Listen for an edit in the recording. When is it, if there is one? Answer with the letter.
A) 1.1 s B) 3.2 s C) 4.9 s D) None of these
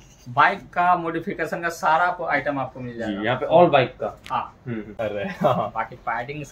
C